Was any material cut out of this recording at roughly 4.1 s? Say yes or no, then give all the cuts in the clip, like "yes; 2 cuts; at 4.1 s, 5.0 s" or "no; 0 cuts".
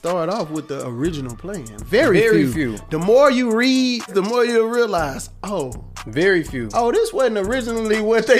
yes; 1 cut; at 4.1 s